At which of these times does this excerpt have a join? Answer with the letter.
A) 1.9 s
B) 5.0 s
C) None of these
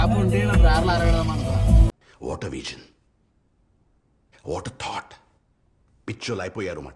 A